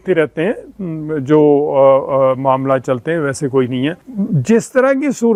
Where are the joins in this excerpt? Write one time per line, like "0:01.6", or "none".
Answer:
none

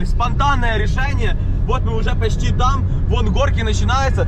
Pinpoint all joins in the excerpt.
none

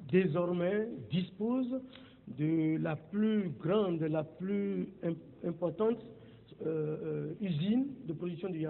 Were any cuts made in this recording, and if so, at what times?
0:05.0

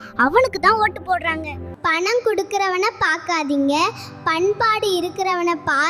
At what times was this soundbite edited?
0:01.6

